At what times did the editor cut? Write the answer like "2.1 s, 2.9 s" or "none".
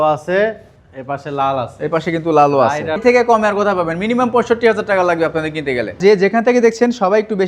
3.0 s, 6.0 s